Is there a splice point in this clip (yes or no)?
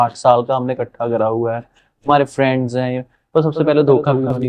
no